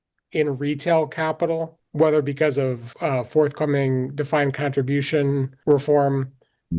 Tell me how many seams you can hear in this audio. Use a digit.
3